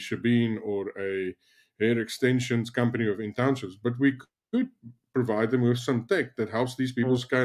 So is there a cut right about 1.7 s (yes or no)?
no